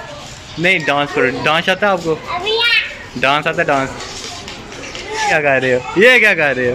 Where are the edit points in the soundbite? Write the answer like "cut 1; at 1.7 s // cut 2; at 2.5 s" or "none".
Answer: cut 1; at 5.3 s